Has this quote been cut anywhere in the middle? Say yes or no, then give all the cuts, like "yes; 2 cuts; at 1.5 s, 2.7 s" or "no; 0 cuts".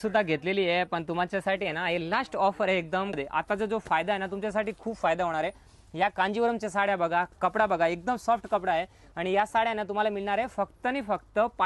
yes; 1 cut; at 3.1 s